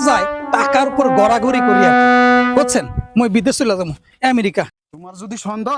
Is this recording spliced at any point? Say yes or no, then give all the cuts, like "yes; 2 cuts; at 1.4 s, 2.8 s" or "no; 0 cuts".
yes; 1 cut; at 4.8 s